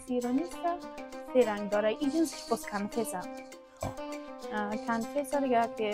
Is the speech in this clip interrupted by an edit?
no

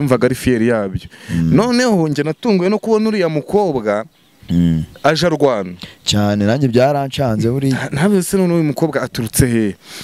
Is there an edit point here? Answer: no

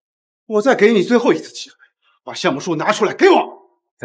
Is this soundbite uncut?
yes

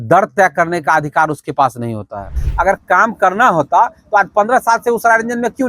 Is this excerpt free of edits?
no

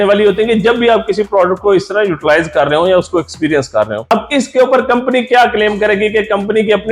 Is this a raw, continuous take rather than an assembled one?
no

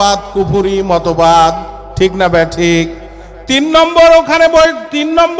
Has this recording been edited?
no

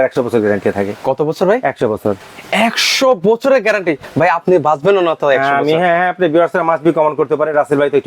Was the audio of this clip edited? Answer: no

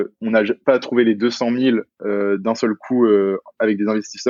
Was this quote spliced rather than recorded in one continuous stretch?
no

